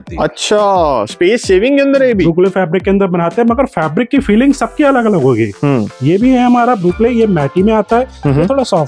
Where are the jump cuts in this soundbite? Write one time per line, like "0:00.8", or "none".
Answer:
0:02.2